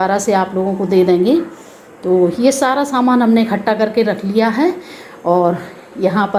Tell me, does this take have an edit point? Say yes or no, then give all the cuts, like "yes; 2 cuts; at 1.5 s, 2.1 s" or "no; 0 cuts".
no; 0 cuts